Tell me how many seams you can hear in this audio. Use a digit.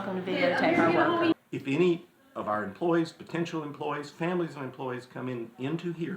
1